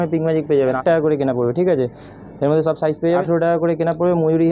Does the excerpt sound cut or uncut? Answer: cut